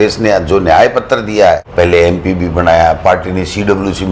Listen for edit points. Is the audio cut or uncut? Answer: cut